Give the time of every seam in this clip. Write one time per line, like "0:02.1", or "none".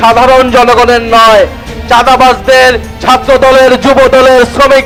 none